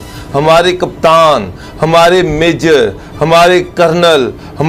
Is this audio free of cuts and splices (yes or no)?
yes